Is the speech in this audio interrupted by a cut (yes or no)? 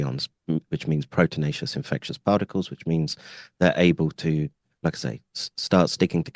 no